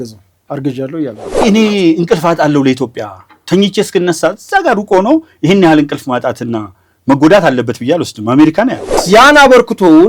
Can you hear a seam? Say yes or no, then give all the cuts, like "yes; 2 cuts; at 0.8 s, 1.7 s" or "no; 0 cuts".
yes; 2 cuts; at 1.4 s, 8.9 s